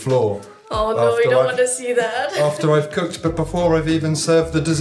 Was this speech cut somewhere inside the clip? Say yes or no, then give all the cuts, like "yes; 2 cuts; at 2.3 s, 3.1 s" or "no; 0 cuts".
no; 0 cuts